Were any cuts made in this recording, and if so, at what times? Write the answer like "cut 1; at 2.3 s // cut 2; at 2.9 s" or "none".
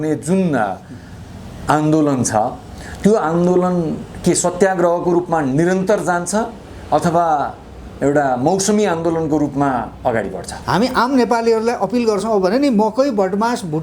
cut 1; at 10.6 s